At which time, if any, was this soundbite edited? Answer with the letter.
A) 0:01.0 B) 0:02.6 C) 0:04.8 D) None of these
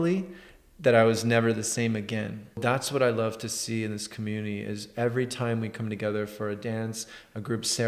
B